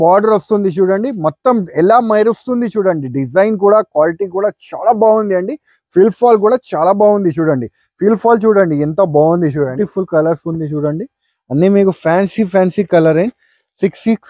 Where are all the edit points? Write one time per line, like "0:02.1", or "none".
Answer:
0:09.7